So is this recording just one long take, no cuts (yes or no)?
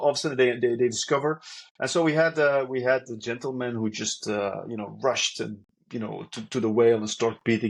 yes